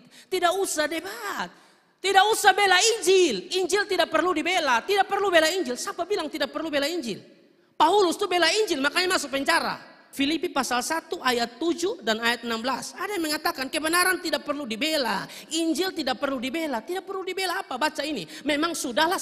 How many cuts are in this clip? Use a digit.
1